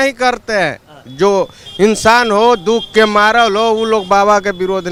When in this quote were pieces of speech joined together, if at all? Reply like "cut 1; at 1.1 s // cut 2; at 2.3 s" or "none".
none